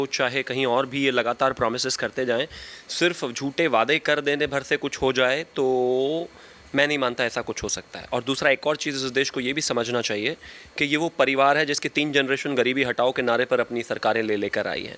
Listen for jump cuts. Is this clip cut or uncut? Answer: uncut